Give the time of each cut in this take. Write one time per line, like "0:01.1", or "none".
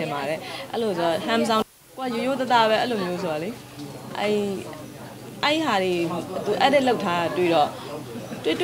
0:01.8